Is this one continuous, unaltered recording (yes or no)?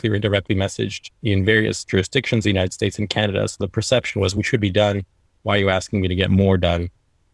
yes